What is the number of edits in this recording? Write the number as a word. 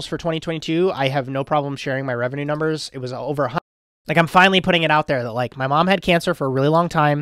one